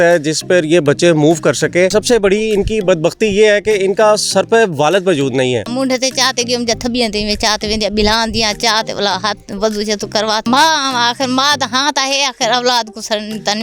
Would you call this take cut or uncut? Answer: cut